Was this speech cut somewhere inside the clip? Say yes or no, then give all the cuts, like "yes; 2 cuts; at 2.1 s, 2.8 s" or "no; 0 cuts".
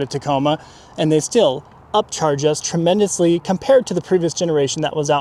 no; 0 cuts